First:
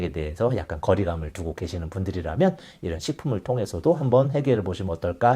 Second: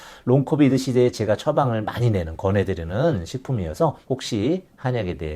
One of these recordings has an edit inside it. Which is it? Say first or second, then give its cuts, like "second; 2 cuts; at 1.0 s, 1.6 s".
second; 1 cut; at 4.0 s